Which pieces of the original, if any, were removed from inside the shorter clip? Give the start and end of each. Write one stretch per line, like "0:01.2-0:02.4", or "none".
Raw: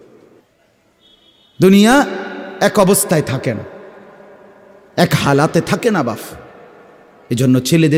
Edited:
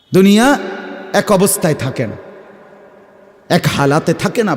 none